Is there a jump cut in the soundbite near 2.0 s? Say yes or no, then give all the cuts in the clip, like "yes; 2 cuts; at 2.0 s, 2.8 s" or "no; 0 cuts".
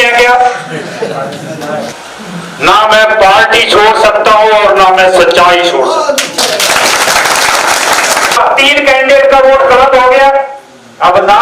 yes; 2 cuts; at 2.0 s, 8.4 s